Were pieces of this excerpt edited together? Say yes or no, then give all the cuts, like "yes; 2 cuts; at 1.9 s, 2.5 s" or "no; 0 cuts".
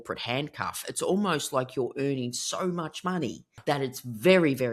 yes; 1 cut; at 3.6 s